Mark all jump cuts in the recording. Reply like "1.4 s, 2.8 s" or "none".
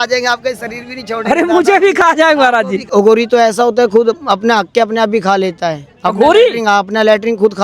2.9 s

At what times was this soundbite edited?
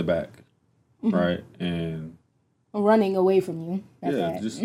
none

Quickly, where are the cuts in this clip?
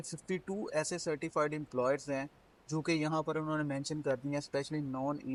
none

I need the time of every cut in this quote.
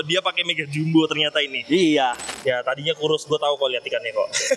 2.2 s

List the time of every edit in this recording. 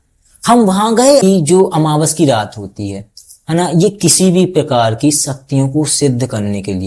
1.2 s

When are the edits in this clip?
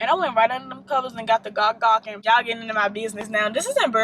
2.1 s

